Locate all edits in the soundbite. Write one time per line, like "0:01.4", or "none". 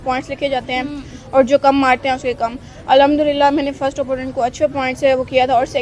none